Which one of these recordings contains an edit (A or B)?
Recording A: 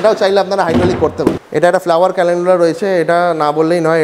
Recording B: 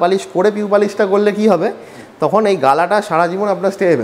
A